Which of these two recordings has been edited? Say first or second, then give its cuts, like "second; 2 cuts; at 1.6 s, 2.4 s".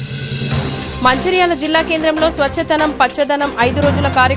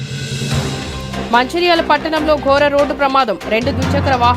first; 1 cut; at 0.9 s